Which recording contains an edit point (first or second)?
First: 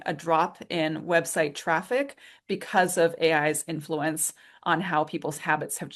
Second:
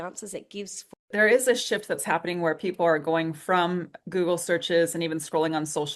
second